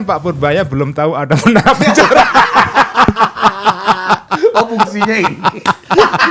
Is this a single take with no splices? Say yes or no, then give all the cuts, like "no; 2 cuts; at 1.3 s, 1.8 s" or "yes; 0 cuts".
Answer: yes; 0 cuts